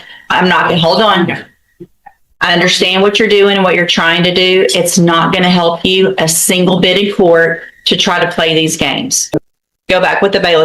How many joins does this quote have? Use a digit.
1